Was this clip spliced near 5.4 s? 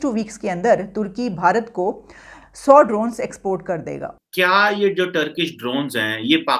no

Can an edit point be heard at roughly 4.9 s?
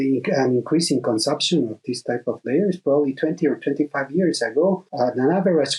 yes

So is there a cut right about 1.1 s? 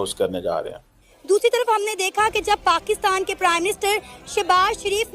yes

